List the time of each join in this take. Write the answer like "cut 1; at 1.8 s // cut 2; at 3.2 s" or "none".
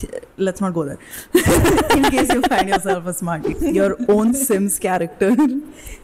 cut 1; at 3.5 s